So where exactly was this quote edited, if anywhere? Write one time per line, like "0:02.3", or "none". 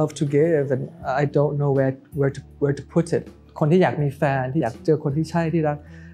0:03.5
0:04.6